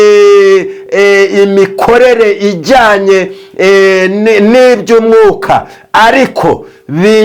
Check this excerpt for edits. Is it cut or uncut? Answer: uncut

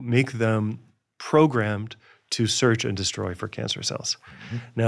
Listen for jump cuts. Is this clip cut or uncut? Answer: uncut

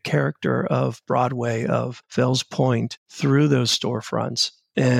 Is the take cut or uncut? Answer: cut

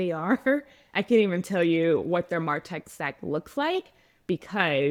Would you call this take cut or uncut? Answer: uncut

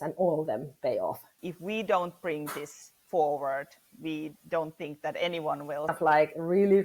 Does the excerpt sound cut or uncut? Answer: cut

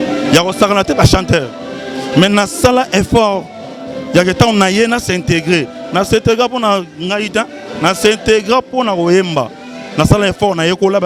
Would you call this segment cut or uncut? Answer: uncut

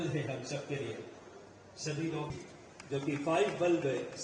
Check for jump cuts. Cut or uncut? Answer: cut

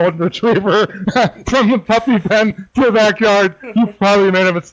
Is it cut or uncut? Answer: uncut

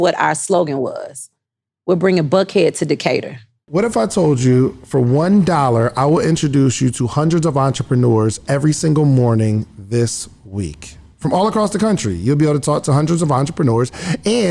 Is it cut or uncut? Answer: cut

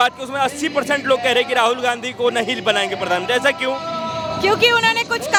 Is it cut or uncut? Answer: uncut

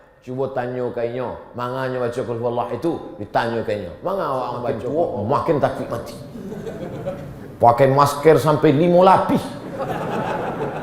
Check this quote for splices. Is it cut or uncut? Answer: cut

